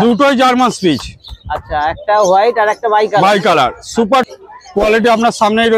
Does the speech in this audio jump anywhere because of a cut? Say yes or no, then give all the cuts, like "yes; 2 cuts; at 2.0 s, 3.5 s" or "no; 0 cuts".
yes; 1 cut; at 4.3 s